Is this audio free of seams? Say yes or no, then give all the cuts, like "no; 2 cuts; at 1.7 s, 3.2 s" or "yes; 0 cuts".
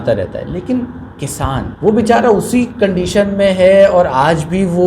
no; 1 cut; at 1.7 s